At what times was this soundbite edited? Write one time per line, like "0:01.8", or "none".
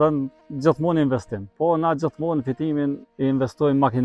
0:01.4
0:03.1